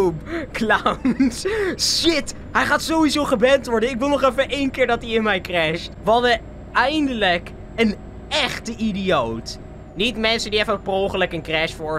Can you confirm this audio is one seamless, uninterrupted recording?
yes; 0 cuts

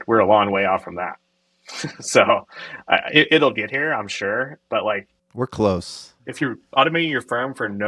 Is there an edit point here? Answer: no; 0 cuts

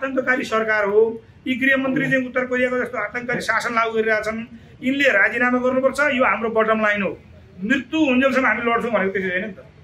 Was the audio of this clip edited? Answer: no; 0 cuts

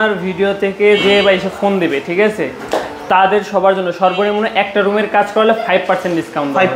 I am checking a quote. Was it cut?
no; 0 cuts

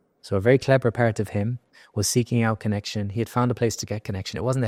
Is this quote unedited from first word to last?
yes; 0 cuts

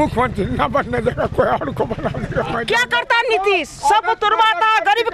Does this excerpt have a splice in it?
yes; 1 cut; at 2.6 s

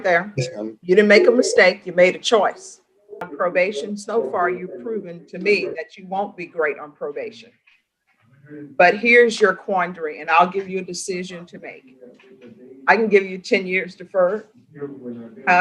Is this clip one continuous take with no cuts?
no; 1 cut; at 3.2 s

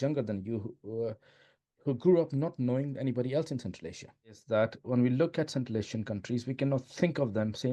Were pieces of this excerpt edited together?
yes; 1 cut; at 4.4 s

